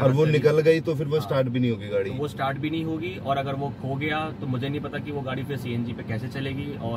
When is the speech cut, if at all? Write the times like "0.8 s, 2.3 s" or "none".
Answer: none